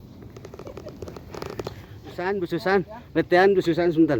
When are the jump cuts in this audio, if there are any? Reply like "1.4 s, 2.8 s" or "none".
2.4 s